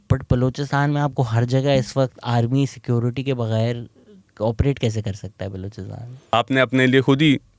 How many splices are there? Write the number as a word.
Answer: one